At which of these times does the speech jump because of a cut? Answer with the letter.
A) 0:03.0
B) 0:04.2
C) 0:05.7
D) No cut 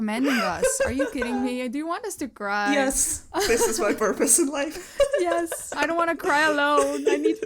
C